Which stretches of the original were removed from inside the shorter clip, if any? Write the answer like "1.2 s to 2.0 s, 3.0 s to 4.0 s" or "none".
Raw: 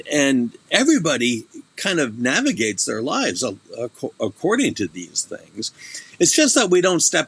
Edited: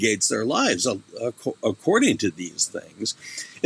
none